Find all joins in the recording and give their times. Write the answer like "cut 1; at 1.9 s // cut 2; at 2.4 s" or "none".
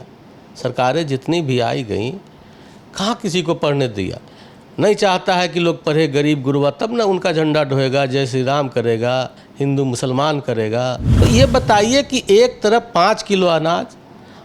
cut 1; at 11.2 s